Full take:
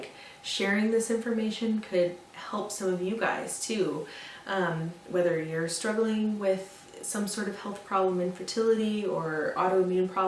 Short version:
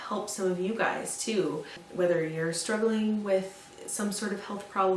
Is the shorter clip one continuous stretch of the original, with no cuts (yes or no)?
no